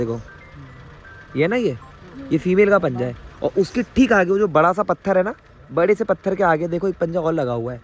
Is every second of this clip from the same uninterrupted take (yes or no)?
yes